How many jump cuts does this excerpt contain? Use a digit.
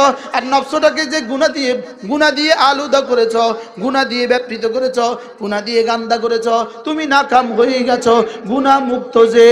0